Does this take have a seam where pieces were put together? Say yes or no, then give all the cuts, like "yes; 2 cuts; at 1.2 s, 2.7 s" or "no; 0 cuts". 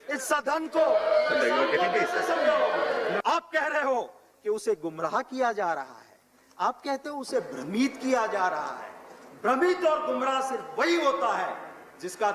yes; 1 cut; at 3.2 s